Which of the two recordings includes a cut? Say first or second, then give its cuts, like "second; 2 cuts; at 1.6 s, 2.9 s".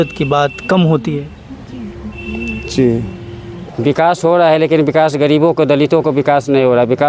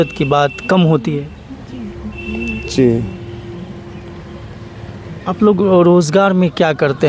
first; 1 cut; at 3.6 s